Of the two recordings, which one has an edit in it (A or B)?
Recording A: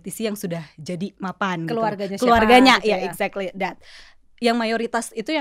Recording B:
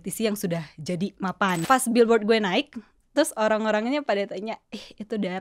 B